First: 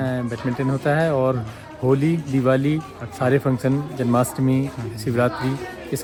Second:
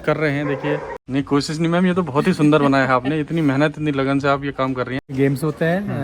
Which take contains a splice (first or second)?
second